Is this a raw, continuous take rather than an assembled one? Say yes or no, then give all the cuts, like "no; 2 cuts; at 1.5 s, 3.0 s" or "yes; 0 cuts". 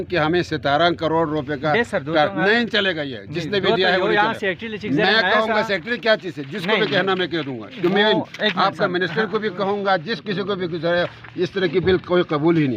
yes; 0 cuts